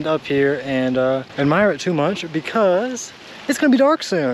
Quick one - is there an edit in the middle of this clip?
no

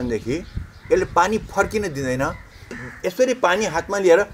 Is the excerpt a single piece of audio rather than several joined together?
no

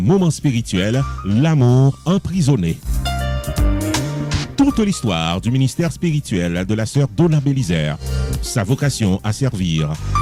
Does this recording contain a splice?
no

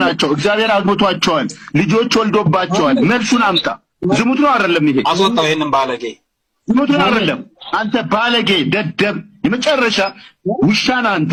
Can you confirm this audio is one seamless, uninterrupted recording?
yes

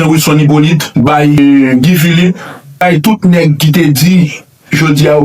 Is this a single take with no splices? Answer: no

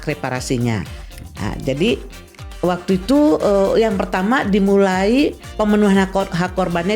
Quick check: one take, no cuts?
yes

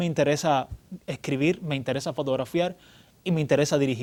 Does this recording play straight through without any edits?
yes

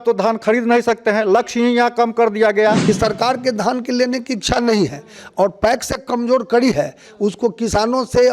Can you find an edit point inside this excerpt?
yes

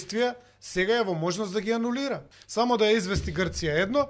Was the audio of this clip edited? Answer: yes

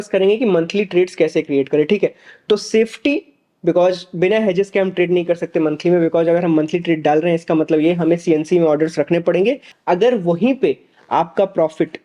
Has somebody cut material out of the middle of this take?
yes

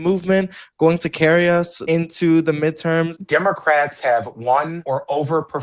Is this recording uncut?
no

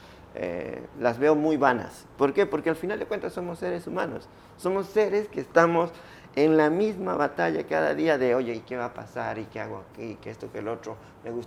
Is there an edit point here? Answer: no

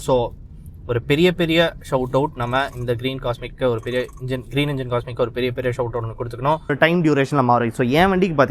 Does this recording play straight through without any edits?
no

